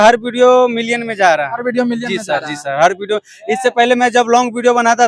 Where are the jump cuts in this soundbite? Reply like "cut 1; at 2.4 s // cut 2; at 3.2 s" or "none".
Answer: none